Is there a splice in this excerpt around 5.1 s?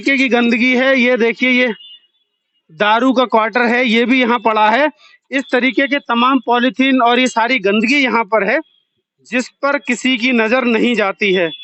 no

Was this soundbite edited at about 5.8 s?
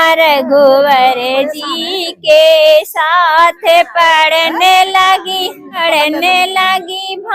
yes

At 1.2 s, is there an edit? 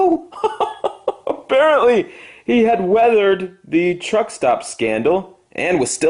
no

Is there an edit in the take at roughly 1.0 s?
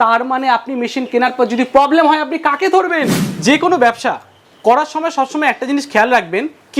no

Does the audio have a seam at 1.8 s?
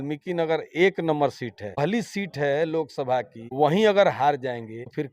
yes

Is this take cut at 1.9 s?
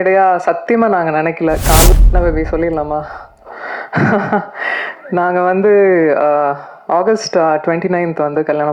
yes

